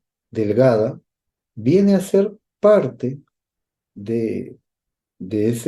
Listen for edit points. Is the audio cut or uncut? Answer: uncut